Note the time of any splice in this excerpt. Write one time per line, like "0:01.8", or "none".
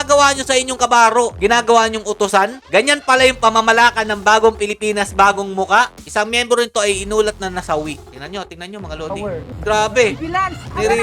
0:05.9
0:09.5